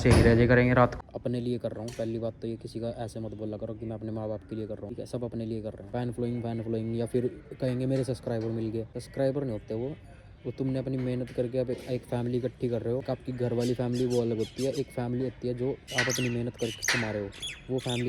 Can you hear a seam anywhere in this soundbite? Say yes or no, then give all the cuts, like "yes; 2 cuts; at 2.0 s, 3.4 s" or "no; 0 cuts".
yes; 6 cuts; at 1.0 s, 4.9 s, 5.8 s, 9.0 s, 13.0 s, 15.9 s